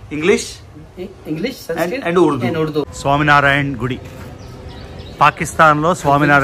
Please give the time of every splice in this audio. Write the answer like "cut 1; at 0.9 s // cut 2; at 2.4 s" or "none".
cut 1; at 2.9 s